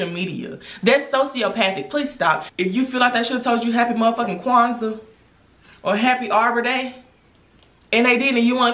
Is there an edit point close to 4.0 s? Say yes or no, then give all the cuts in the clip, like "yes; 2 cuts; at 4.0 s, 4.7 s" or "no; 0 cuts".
no; 1 cut; at 2.5 s